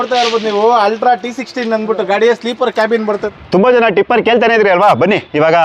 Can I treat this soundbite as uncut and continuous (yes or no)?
no